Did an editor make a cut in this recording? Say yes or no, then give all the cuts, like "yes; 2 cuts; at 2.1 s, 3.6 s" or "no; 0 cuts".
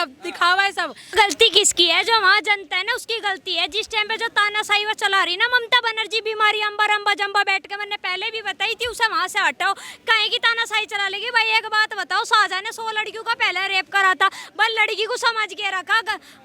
yes; 1 cut; at 1.1 s